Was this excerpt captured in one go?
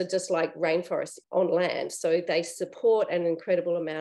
no; 1 cut; at 1.2 s

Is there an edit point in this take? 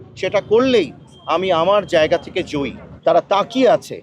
yes; 1 cut; at 2.9 s

